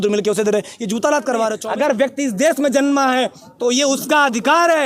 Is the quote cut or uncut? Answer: cut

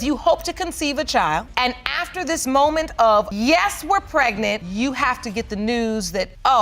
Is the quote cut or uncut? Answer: uncut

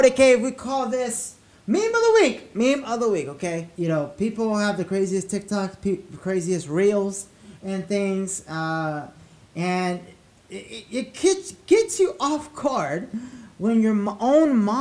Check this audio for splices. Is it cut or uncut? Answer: cut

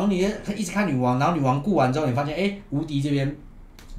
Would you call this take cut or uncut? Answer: uncut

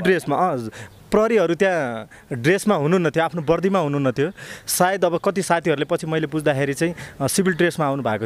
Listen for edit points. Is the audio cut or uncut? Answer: uncut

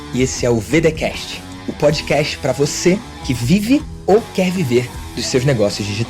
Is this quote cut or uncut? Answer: uncut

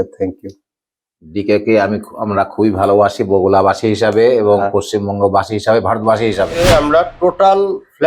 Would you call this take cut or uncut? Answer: cut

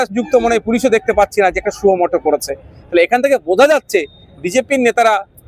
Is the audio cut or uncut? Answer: uncut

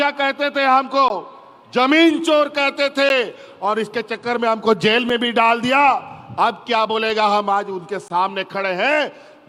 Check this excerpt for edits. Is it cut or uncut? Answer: uncut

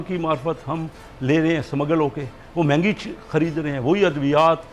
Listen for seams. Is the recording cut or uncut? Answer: uncut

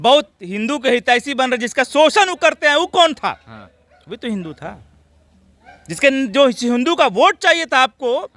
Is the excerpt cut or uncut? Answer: uncut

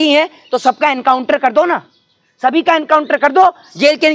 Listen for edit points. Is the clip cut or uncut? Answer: uncut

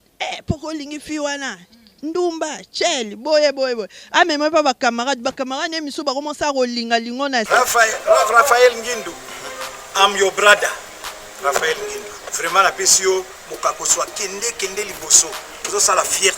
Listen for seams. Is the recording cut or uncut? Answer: cut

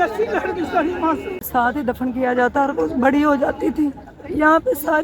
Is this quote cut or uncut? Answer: cut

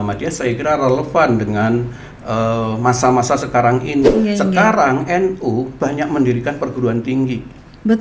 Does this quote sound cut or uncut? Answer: cut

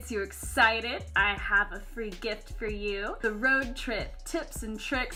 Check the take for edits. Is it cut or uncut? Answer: uncut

